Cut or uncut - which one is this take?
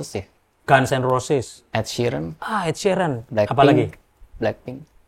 cut